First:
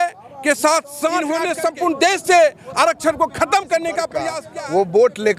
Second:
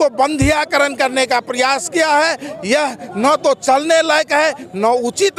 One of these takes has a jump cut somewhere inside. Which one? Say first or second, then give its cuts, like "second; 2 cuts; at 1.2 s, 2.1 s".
first; 2 cuts; at 1.4 s, 4.4 s